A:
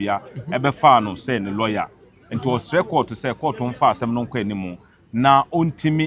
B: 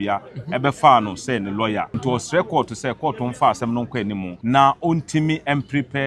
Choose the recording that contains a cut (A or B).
B